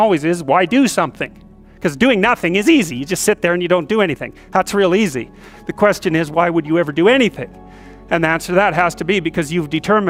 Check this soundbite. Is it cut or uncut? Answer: uncut